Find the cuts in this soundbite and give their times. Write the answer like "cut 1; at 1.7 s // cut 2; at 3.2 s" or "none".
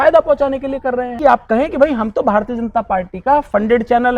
cut 1; at 1.1 s